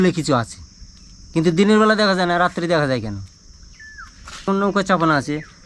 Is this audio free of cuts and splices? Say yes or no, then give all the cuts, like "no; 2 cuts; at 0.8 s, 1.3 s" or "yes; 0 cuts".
no; 1 cut; at 4.4 s